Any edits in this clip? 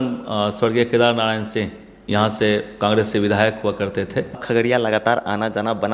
yes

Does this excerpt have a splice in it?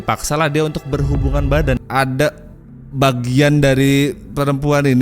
yes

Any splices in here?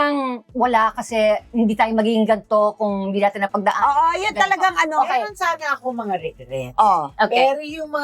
no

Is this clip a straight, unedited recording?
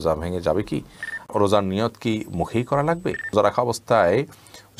no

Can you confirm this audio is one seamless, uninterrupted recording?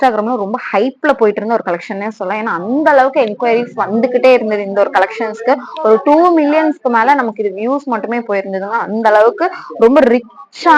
yes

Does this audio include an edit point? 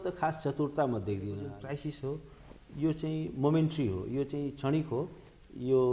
yes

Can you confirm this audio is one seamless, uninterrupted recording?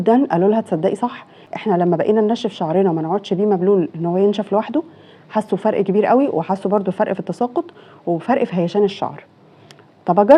yes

